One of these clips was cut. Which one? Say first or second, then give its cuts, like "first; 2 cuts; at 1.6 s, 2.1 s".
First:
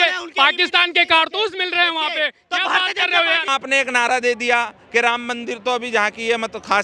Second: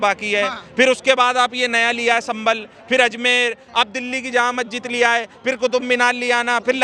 first; 1 cut; at 3.5 s